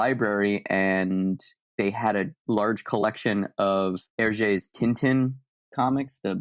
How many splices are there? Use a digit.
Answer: 2